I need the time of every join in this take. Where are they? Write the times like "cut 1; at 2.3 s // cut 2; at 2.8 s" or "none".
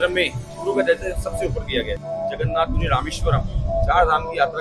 cut 1; at 2.0 s